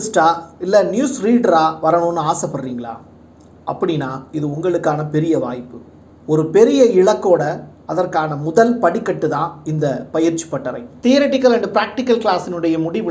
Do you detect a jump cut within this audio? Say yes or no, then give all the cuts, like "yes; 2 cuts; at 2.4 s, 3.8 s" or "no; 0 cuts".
no; 0 cuts